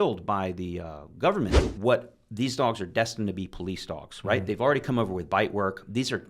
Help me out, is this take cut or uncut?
cut